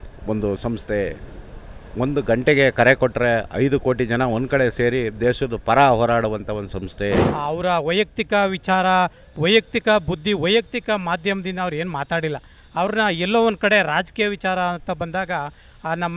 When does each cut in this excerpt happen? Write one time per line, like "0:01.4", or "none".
0:07.3